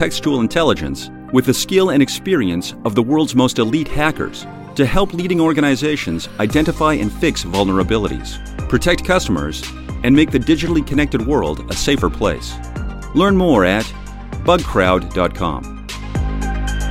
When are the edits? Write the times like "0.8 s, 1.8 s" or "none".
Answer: 15.9 s